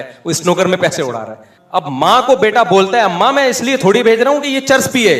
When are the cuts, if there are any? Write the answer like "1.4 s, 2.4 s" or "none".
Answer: none